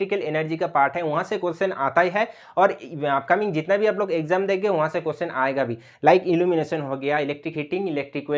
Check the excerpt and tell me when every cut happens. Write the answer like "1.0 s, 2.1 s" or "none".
none

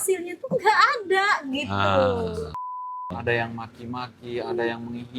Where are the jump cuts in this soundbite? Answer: 2.8 s

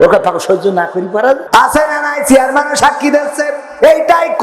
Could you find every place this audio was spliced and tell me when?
1.4 s

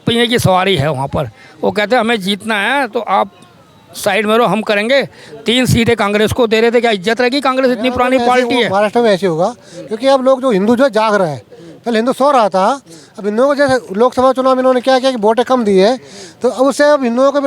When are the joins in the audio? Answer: 8.7 s

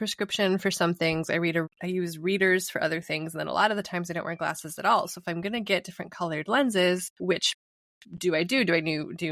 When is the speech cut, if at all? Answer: 1.8 s, 7.1 s

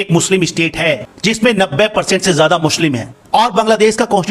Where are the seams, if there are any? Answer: none

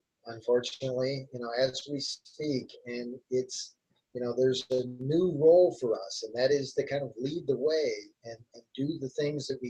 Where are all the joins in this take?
none

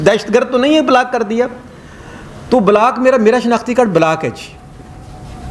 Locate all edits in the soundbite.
none

